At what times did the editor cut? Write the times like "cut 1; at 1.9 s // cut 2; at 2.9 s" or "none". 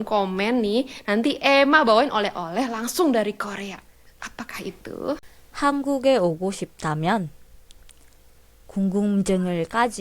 cut 1; at 5.4 s